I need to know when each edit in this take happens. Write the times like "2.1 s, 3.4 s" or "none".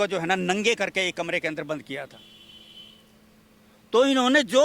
none